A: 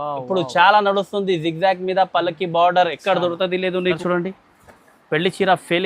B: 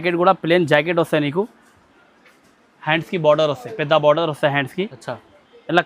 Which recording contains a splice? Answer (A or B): A